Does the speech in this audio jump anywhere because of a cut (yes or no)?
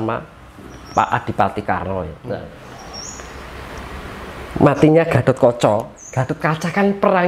yes